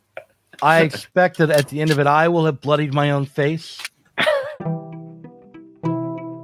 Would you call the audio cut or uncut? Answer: cut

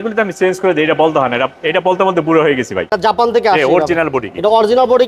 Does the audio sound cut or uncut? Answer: cut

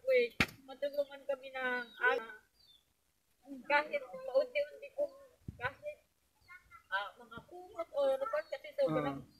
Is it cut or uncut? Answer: cut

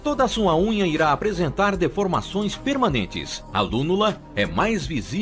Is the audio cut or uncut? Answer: cut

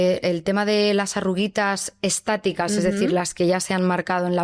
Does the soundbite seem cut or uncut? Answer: uncut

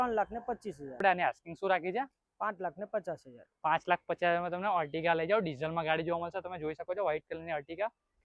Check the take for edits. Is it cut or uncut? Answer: cut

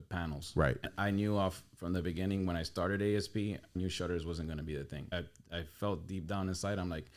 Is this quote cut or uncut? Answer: cut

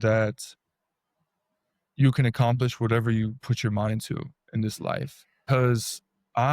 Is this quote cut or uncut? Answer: cut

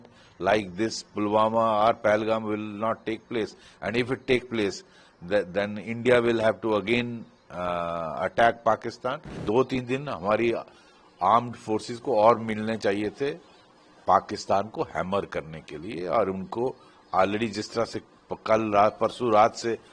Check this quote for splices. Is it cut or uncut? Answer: cut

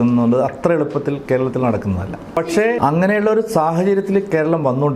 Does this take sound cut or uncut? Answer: cut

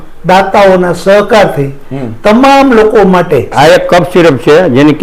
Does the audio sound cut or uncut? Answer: cut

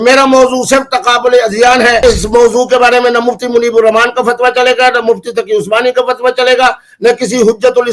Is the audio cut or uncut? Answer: cut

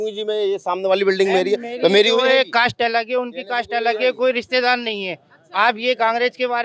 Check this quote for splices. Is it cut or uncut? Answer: uncut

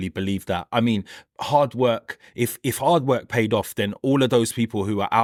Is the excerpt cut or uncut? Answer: uncut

